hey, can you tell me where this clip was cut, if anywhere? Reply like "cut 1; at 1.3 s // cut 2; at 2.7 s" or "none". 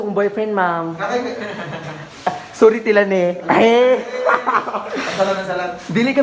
none